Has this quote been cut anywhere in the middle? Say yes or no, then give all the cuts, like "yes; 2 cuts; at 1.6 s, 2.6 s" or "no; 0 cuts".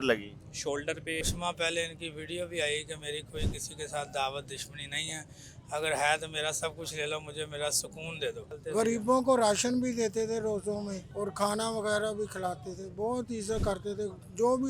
yes; 3 cuts; at 1.3 s, 8.6 s, 11.0 s